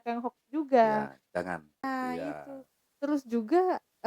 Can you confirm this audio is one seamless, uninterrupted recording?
no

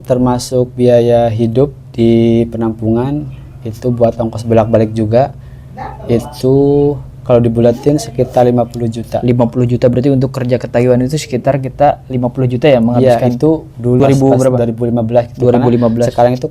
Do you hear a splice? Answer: yes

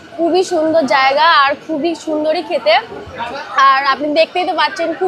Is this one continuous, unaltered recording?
yes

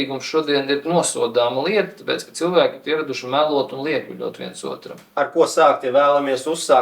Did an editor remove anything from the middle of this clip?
yes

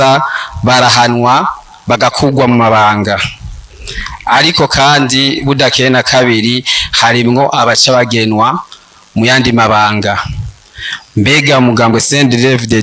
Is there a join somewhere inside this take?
no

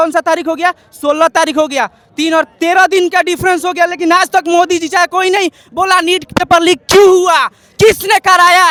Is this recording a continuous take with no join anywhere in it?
yes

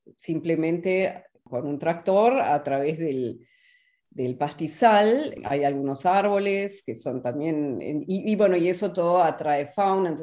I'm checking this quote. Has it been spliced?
yes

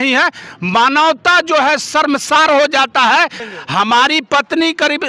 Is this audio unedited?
no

